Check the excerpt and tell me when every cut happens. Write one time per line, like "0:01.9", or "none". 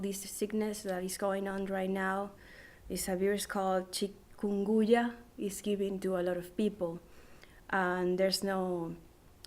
0:06.3